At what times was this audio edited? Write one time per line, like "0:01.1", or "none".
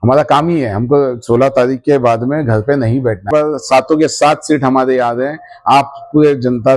0:03.3

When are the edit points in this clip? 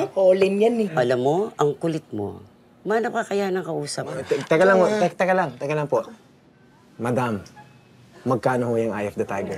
0:04.2

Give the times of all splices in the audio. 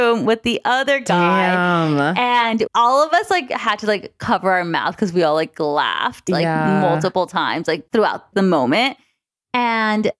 0:08.3

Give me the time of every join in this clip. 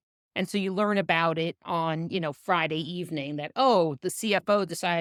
none

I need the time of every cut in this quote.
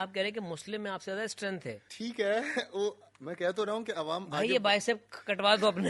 0:01.9

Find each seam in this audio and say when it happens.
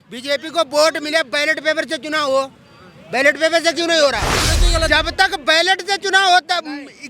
0:04.6

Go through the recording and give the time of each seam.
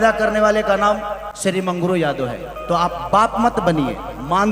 0:01.2

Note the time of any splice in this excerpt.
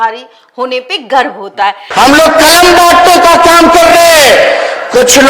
0:01.8

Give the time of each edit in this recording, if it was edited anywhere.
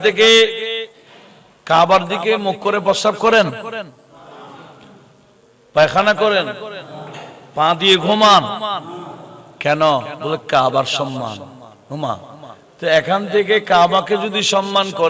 0:10.1

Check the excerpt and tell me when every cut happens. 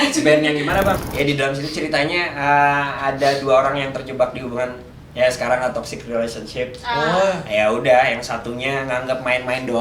0:01.0

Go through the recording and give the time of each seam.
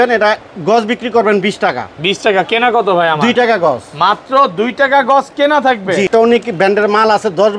0:06.1

